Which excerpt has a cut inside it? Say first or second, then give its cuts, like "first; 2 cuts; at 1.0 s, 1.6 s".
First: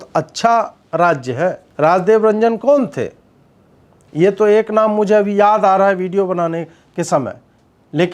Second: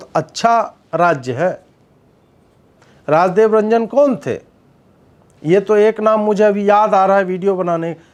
first; 1 cut; at 1.6 s